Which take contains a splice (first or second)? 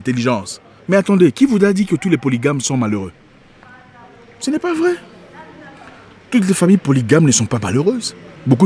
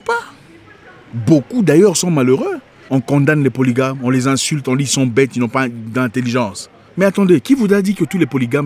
second